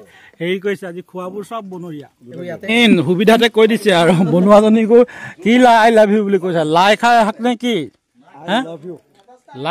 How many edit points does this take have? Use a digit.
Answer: 1